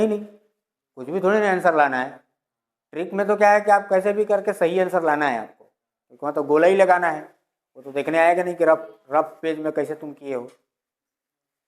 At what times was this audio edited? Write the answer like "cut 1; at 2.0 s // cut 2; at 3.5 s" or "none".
none